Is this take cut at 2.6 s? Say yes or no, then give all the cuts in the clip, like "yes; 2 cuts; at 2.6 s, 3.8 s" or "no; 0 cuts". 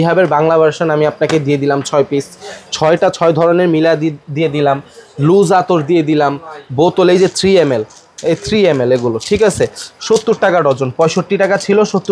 no; 0 cuts